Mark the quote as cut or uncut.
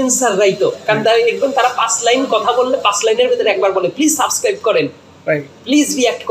uncut